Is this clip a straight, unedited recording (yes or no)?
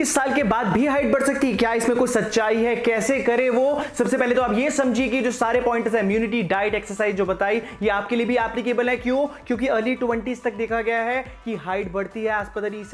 yes